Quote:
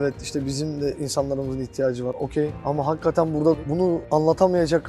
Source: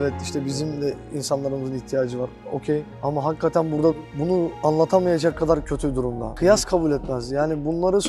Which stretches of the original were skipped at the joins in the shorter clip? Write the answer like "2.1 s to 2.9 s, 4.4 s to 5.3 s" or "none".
1.0 s to 1.2 s, 2.5 s to 2.8 s, 4.3 s to 4.4 s